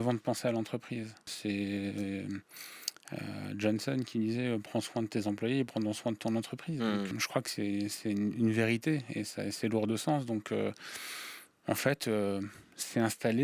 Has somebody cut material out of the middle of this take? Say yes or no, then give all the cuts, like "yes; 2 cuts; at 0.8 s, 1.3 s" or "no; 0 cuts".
yes; 2 cuts; at 1.2 s, 7.1 s